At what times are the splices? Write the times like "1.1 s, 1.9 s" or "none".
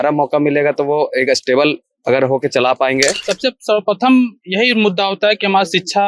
3.3 s